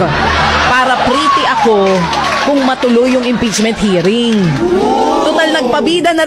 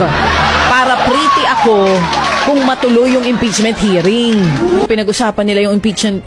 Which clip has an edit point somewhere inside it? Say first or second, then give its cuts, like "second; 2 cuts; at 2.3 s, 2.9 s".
second; 1 cut; at 4.9 s